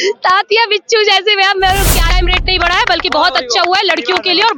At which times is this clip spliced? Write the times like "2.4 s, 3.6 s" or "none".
2.1 s